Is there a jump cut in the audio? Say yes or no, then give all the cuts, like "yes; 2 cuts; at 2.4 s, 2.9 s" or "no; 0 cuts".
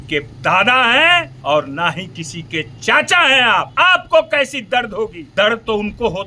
yes; 3 cuts; at 1.3 s, 3.7 s, 5.2 s